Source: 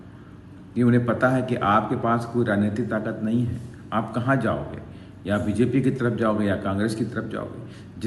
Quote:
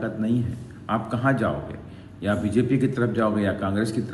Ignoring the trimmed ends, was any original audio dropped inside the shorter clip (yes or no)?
no